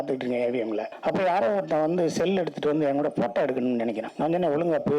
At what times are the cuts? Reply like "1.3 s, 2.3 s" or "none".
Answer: 0.9 s, 4.1 s